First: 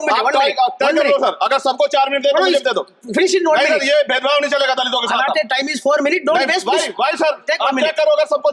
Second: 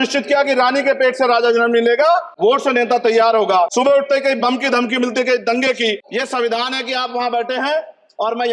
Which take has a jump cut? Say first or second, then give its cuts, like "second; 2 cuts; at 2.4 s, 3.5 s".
second; 3 cuts; at 2.3 s, 3.7 s, 6.0 s